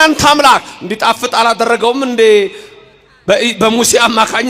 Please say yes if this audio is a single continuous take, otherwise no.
yes